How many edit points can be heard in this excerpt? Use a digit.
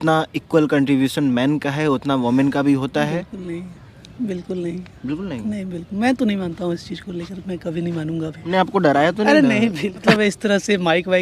2